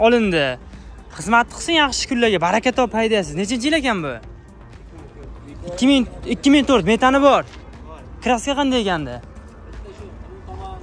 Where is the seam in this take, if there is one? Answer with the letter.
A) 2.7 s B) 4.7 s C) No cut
C